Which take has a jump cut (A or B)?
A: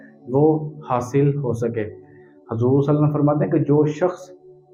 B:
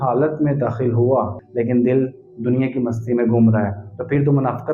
B